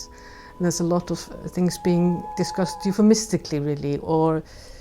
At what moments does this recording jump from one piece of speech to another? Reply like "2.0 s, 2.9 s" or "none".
2.3 s